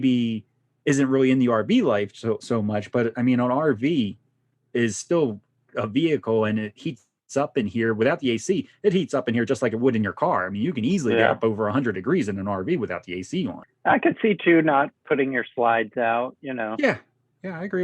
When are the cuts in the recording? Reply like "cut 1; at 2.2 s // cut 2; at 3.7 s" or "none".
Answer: cut 1; at 13.6 s